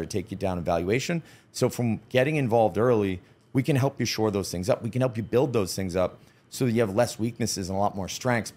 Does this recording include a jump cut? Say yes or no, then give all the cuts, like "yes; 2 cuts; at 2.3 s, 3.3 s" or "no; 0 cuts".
no; 0 cuts